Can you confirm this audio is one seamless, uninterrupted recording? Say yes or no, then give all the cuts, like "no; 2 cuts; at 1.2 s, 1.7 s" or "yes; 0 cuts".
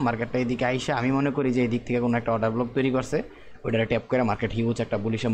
yes; 0 cuts